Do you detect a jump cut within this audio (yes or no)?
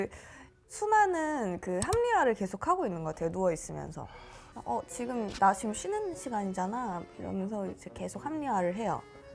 yes